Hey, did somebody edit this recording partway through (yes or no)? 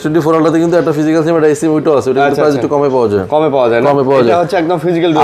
no